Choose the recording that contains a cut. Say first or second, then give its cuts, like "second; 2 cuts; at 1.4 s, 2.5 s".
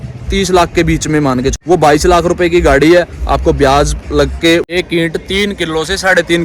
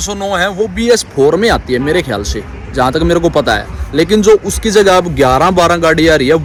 first; 2 cuts; at 1.6 s, 4.7 s